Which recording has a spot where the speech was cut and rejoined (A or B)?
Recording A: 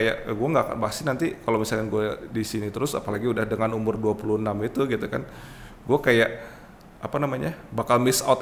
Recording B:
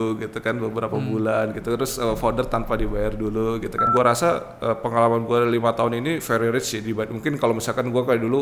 B